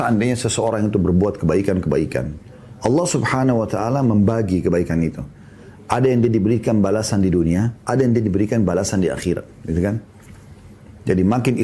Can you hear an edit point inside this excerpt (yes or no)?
no